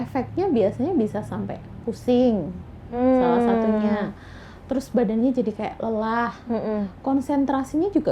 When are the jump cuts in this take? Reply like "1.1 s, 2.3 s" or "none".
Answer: none